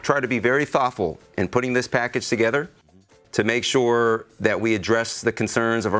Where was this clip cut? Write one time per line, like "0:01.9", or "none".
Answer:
none